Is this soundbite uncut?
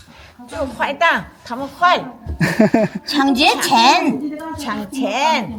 yes; 0 cuts

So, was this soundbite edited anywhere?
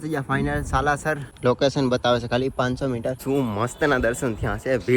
yes; 2 cuts; at 1.4 s, 3.1 s

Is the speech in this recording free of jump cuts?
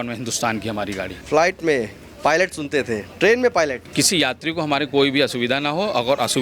no; 2 cuts; at 1.1 s, 3.8 s

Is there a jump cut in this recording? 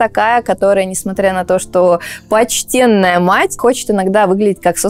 no; 0 cuts

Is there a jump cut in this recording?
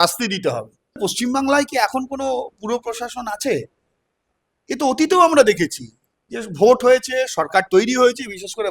yes; 1 cut; at 1.0 s

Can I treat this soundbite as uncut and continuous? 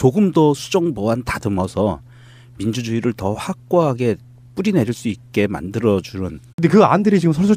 yes; 0 cuts

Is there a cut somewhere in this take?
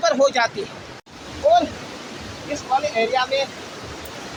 no; 0 cuts

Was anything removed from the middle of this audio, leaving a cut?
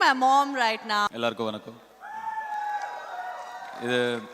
yes; 1 cut; at 1.1 s

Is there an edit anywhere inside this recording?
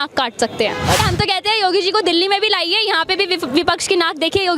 yes; 1 cut; at 1.0 s

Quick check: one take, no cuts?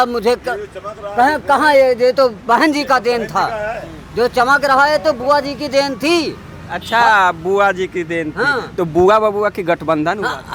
yes; 0 cuts

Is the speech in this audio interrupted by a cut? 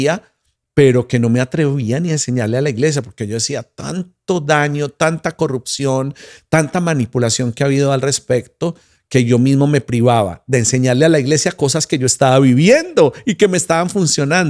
no; 0 cuts

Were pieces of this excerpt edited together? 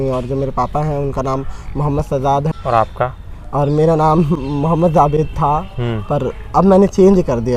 no; 0 cuts

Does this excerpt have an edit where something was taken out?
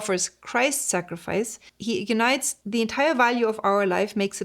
yes; 1 cut; at 2.5 s

